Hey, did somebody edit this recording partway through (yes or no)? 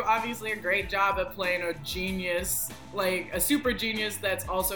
no